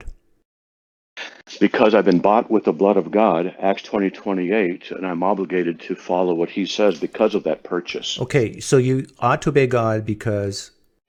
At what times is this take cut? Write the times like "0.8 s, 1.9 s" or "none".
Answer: none